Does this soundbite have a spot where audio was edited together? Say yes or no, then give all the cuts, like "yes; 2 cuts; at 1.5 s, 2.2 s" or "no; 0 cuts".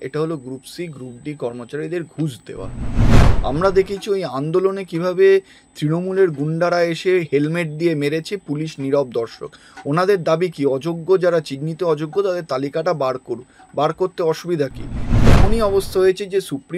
yes; 2 cuts; at 3.1 s, 15.3 s